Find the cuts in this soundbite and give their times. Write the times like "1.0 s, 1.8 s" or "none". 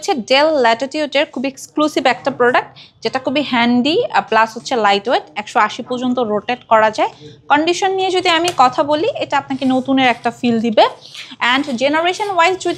none